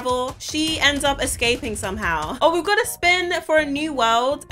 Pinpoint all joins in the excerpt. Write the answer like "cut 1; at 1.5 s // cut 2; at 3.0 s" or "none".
cut 1; at 2.3 s